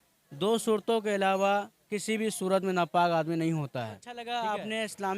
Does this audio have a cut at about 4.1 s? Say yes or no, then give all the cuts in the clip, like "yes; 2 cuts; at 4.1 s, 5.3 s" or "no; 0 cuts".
yes; 1 cut; at 4.1 s